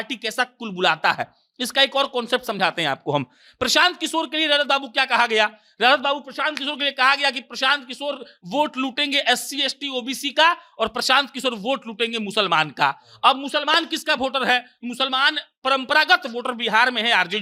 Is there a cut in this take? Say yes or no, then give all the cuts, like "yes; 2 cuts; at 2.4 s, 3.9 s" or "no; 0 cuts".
no; 0 cuts